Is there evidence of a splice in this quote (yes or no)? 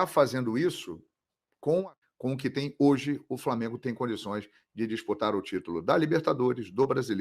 yes